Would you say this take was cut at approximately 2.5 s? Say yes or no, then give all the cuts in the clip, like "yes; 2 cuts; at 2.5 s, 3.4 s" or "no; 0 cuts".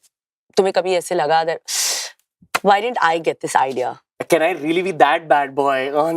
no; 1 cut; at 4.1 s